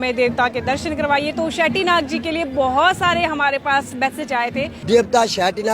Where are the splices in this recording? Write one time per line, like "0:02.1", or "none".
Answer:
0:04.7